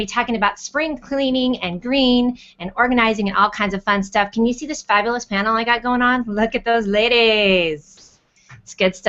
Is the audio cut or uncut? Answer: uncut